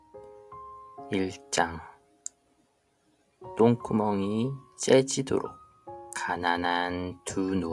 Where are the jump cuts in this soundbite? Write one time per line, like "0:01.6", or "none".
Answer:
0:01.1